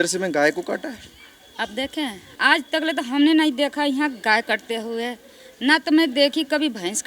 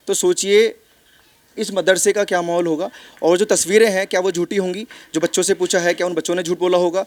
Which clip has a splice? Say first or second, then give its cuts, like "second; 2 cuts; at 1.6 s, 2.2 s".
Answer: first; 1 cut; at 2.3 s